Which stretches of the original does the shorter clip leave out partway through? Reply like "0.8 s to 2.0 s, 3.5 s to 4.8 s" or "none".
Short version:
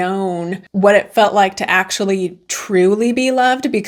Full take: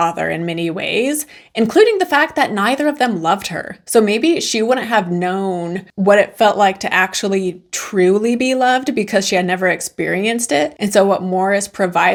none